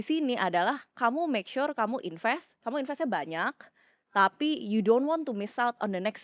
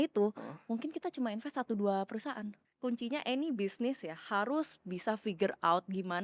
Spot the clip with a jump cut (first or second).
second